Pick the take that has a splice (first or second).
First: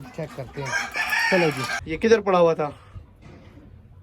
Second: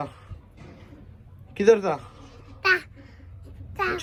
first